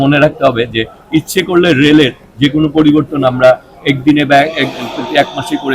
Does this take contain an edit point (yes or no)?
no